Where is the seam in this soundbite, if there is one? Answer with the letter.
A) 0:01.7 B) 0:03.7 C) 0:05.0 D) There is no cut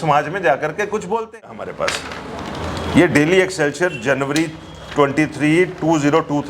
A